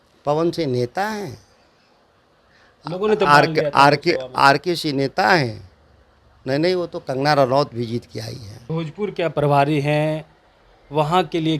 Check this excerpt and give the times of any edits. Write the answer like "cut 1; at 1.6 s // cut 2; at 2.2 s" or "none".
cut 1; at 8.6 s